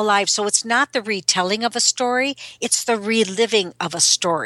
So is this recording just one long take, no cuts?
yes; 0 cuts

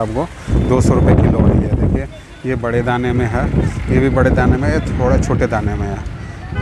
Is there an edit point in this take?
no; 0 cuts

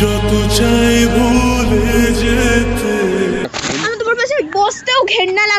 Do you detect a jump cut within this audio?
yes; 1 cut; at 3.5 s

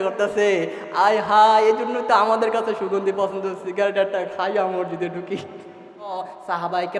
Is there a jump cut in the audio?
yes; 1 cut; at 6.1 s

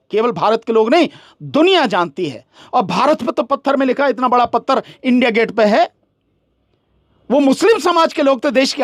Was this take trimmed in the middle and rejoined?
no; 0 cuts

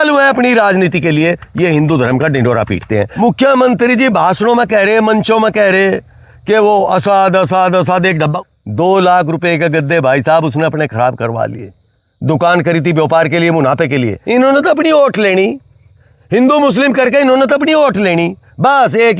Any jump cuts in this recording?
yes; 3 cuts; at 3.1 s, 8.4 s, 14.2 s

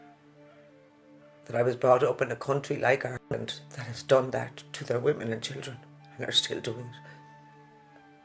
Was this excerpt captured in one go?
no; 1 cut; at 6.9 s

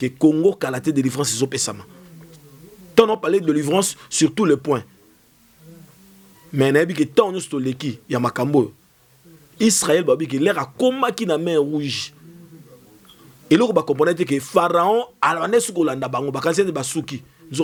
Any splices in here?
no; 0 cuts

